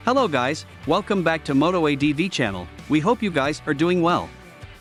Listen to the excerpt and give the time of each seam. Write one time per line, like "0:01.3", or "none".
none